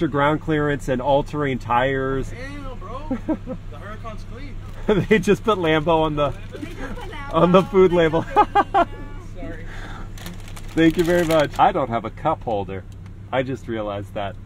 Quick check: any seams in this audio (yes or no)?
yes